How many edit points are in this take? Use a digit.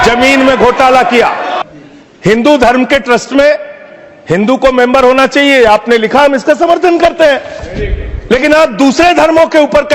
1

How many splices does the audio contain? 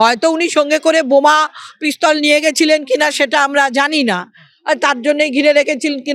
0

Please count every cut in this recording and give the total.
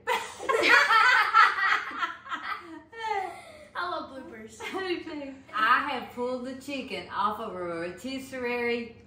1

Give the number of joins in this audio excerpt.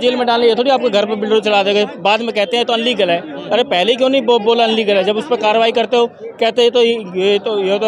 0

